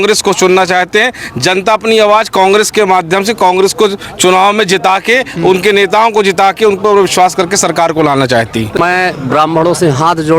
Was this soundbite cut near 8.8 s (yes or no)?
yes